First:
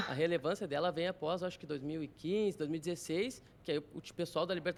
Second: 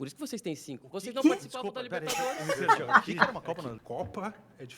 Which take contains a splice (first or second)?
second